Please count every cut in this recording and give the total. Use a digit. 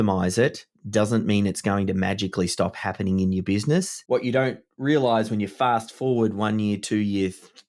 1